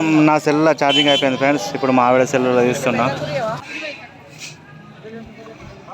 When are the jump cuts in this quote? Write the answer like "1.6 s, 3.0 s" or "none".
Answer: 3.6 s